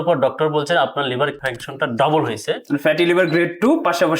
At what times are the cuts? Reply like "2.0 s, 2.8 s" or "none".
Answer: 1.4 s